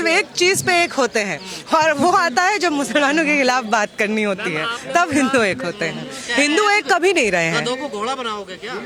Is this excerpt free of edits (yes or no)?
yes